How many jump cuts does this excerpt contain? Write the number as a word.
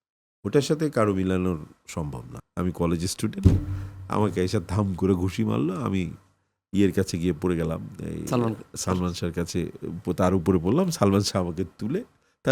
one